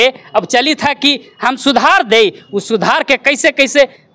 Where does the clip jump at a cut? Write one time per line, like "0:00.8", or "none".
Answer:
none